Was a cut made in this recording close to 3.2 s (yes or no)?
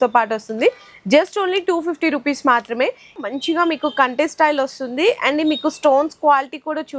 yes